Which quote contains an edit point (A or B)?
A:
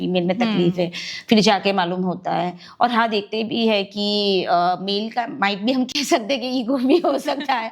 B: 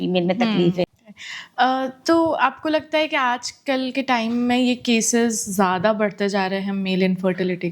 B